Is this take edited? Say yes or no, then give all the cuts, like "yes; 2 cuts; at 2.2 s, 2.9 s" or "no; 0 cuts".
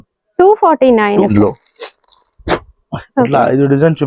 yes; 1 cut; at 1.3 s